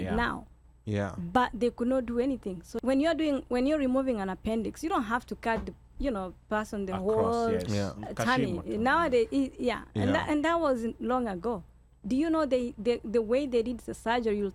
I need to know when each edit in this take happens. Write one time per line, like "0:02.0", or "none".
0:02.7